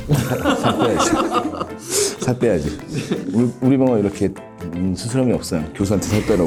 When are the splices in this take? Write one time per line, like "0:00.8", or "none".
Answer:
none